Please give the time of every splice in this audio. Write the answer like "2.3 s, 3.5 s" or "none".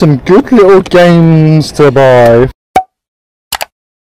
2.5 s